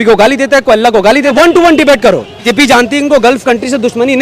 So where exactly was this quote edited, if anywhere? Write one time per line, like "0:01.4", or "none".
0:01.3
0:02.5

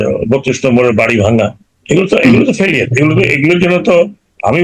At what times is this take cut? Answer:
0:01.7

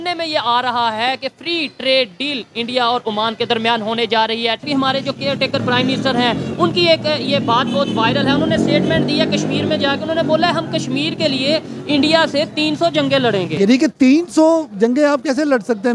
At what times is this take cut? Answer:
0:04.6
0:13.5

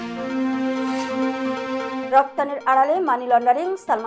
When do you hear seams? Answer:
none

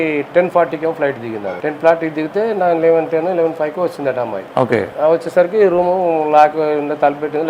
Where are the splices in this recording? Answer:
0:01.5
0:04.4

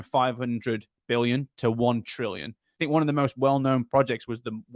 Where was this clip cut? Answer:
0:02.7

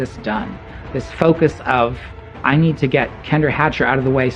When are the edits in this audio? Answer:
0:02.3

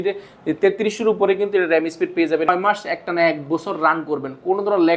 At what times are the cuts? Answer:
0:02.5

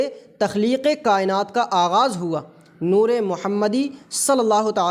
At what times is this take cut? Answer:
none

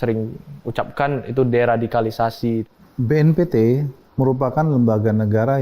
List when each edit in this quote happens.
0:02.7
0:04.0

